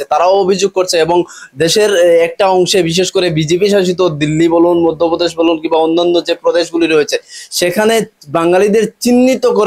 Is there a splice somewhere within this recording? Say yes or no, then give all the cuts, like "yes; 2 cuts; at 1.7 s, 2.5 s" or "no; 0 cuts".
no; 0 cuts